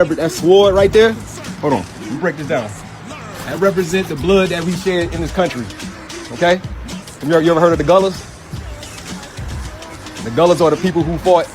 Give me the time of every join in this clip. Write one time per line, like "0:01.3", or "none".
0:04.2
0:09.4